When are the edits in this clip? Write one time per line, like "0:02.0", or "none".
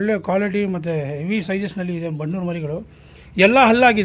none

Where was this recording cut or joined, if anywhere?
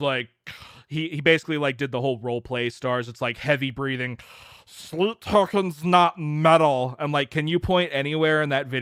none

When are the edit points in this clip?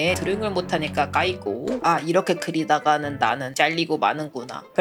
none

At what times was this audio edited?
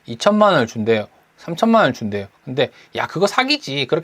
none

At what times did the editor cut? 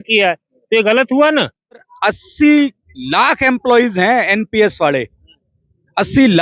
0:01.9

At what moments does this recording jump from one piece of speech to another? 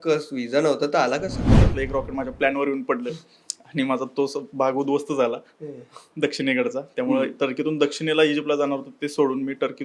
0:01.7

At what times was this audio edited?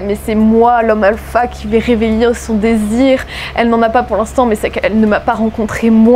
none

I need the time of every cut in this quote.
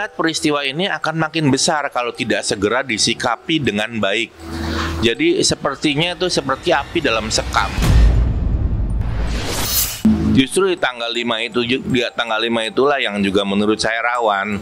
0:07.7
0:10.0

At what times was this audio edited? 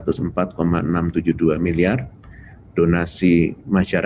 none

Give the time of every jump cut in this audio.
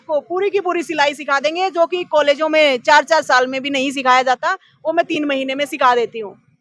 none

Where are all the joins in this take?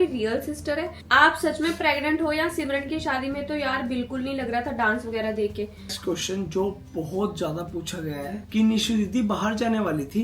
0:01.0
0:06.0
0:08.5

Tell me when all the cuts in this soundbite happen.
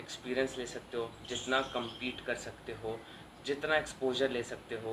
none

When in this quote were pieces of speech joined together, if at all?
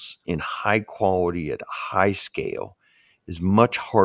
none

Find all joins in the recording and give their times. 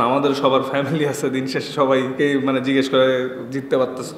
0:02.1

